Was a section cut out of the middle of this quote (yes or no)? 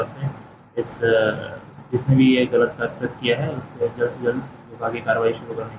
no